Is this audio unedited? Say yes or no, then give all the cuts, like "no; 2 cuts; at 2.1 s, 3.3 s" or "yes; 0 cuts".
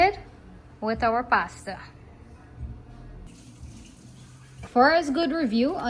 no; 2 cuts; at 3.3 s, 4.5 s